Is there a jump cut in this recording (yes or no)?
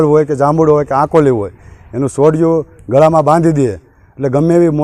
no